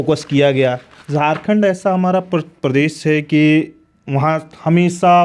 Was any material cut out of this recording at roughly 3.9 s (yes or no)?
no